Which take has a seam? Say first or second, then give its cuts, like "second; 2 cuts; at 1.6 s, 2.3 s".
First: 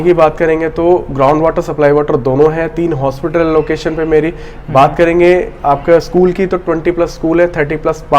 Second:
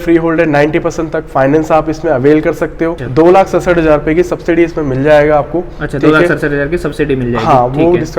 second; 1 cut; at 3.0 s